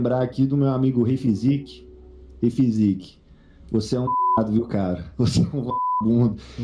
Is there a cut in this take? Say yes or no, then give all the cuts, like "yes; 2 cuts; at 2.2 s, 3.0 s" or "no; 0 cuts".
no; 0 cuts